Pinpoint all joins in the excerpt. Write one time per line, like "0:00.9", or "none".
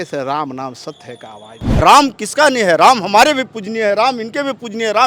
0:01.6